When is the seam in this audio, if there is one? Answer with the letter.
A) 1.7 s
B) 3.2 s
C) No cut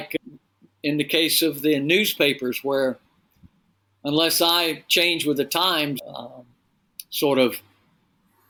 C